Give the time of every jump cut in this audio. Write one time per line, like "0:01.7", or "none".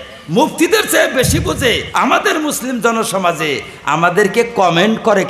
0:01.9